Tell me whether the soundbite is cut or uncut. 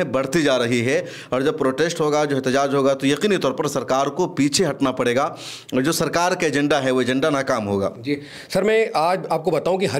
uncut